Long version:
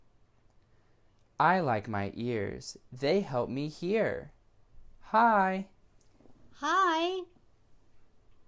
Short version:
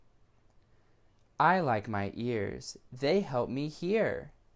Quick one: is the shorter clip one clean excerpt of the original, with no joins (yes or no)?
yes